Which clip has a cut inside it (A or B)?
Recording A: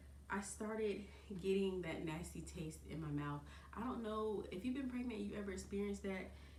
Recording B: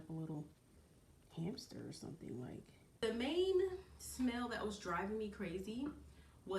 B